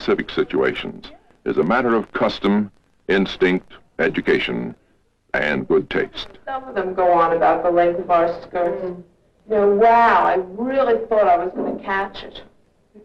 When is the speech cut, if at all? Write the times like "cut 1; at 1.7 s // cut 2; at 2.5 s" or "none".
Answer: cut 1; at 2.0 s